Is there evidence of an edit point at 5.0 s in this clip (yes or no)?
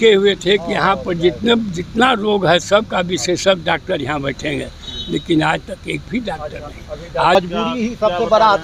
no